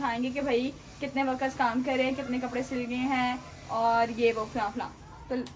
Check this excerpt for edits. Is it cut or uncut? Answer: uncut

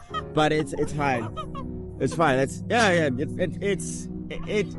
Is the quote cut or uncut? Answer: uncut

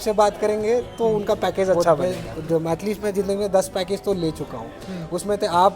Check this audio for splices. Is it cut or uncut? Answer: cut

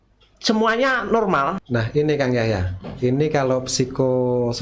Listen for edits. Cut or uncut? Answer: cut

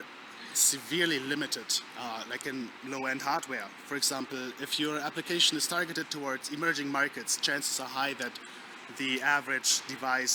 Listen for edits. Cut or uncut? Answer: uncut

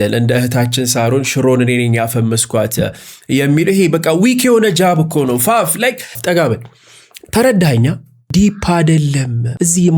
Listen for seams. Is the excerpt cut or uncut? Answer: cut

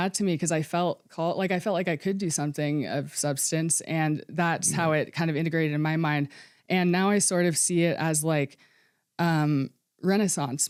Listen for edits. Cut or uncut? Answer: uncut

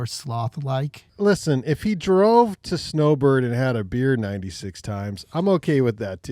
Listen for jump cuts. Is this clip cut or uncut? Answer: cut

